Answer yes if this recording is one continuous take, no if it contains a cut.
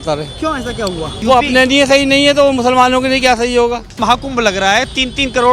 no